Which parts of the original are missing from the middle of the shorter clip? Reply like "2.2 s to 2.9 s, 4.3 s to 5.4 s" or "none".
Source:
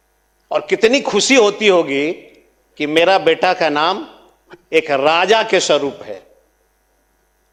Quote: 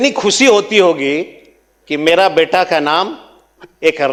none